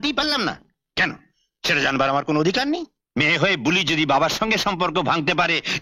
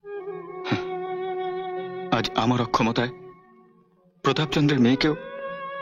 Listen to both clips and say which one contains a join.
first; 1 cut; at 3.0 s

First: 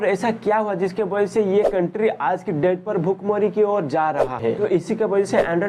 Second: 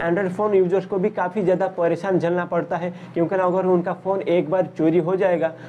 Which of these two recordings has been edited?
first; 1 cut; at 4.4 s

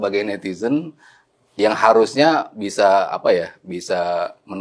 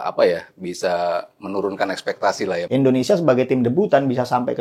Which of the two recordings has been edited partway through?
second; 1 cut; at 2.6 s

